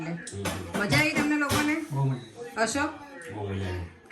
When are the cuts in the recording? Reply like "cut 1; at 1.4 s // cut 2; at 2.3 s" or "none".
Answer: none